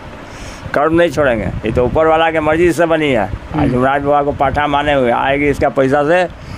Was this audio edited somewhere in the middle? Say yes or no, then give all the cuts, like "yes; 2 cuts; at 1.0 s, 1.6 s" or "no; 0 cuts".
no; 0 cuts